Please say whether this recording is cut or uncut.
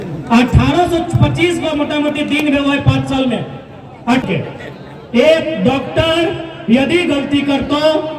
cut